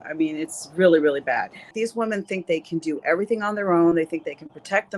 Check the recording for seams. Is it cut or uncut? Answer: cut